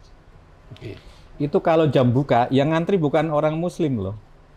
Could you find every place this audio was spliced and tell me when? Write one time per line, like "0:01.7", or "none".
none